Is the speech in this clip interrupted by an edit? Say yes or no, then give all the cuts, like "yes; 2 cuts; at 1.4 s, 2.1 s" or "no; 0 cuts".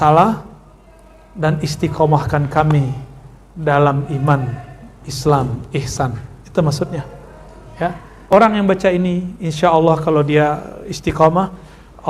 yes; 1 cut; at 8.1 s